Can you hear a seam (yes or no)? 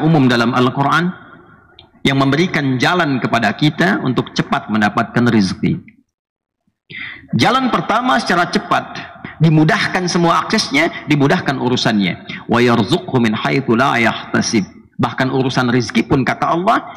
yes